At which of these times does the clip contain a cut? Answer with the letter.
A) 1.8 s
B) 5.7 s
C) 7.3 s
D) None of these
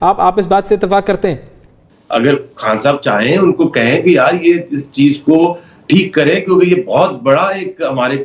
A